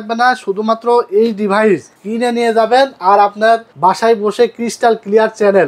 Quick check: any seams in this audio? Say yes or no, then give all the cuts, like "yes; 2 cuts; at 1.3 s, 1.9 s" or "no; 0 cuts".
yes; 2 cuts; at 2.0 s, 3.7 s